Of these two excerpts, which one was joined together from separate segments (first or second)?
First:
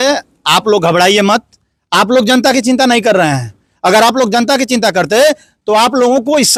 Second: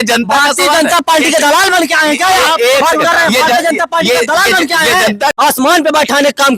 second